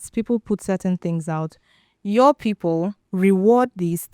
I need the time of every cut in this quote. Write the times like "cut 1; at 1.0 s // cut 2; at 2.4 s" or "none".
cut 1; at 3.0 s